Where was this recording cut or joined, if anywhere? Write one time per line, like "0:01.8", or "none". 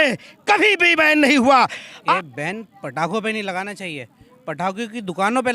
0:02.1